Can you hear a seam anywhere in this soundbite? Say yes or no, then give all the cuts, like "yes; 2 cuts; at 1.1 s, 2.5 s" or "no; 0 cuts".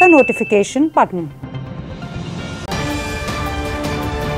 yes; 1 cut; at 2.6 s